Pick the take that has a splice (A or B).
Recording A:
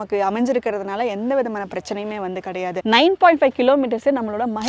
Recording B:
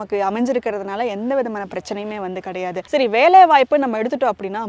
A